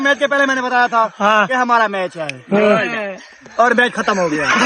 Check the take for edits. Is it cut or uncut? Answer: uncut